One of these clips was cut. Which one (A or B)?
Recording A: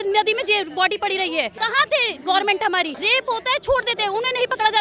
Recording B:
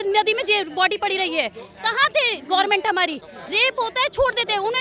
A